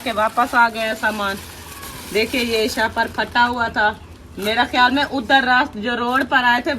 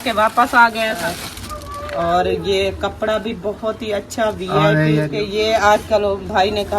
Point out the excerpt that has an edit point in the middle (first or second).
second